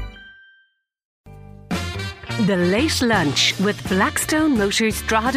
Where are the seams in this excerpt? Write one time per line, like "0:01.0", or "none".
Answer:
0:01.2

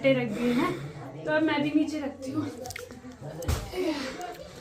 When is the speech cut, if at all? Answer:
none

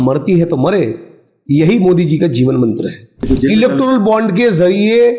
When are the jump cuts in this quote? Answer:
0:03.2

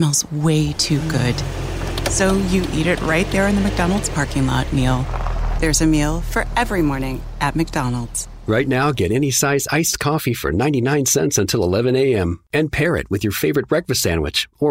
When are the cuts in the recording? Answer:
none

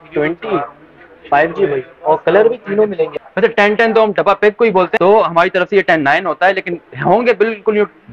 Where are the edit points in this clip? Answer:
0:03.1
0:04.9

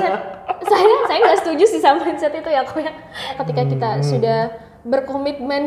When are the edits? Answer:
0:03.4

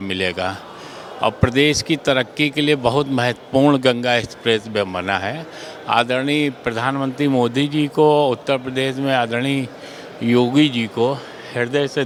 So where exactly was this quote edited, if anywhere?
none

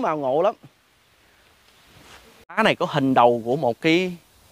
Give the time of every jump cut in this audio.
0:02.6

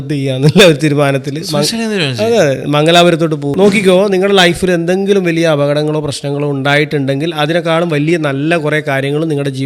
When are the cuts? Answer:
0:03.5

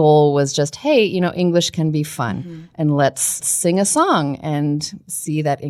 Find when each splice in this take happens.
0:03.5

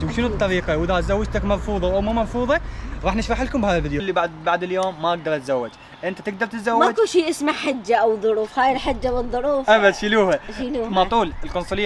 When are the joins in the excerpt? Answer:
0:04.0

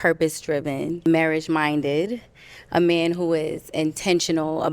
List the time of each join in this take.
0:01.0

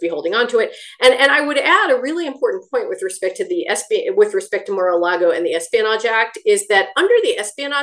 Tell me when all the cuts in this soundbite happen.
none

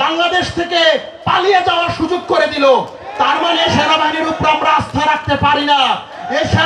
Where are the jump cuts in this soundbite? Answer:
none

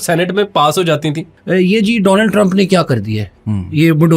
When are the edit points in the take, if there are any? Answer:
0:01.3

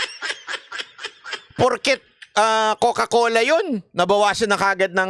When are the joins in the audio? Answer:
0:01.5

